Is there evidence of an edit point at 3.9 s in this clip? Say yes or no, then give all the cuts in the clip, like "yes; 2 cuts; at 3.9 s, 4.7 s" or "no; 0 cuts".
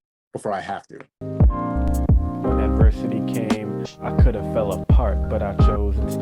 no; 1 cut; at 1.1 s